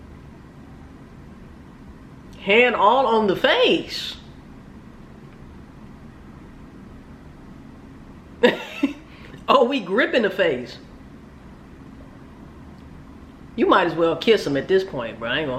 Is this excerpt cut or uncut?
uncut